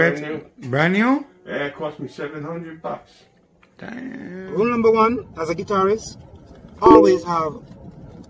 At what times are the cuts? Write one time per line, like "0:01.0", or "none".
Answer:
0:04.5